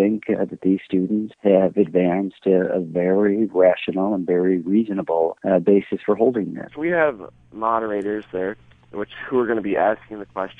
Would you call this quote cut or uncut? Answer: cut